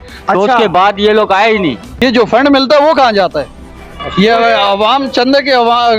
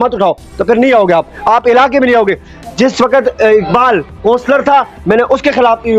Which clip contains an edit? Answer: first; 1 cut; at 1.9 s

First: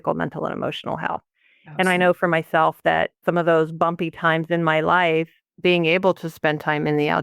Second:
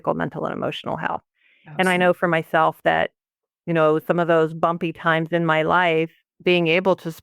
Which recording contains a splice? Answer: first; 1 cut; at 3.2 s

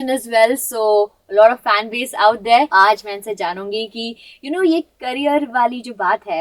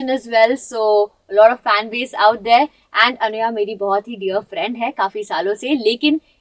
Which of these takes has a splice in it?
first; 1 cut; at 2.7 s

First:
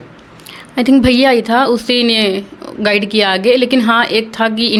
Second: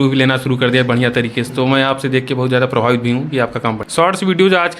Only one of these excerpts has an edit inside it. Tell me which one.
second; 1 cut; at 3.6 s

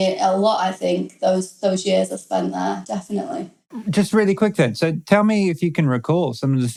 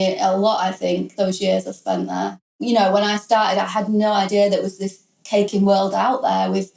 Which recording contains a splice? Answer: second; 2 cuts; at 1.1 s, 2.4 s

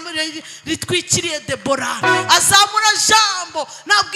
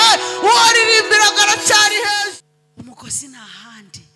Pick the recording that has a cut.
second; 1 cut; at 2.2 s

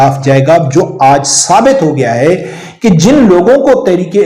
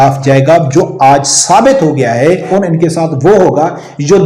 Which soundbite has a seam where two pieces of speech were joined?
second; 1 cut; at 2.5 s

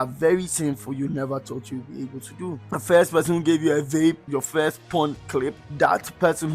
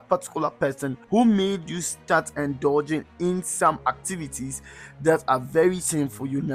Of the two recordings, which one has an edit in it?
first; 2 cuts; at 2.6 s, 4.2 s

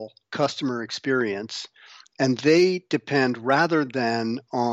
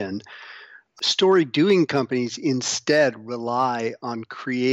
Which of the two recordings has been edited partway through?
second; 1 cut; at 0.9 s

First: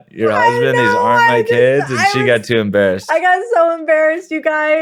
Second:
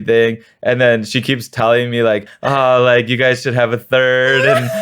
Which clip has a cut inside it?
second; 1 cut; at 2.3 s

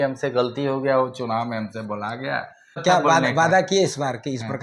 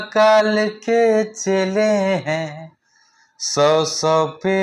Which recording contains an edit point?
first; 1 cut; at 2.8 s

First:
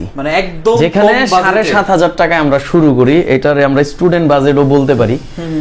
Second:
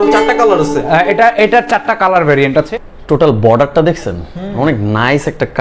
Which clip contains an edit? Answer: second; 1 cut; at 2.7 s

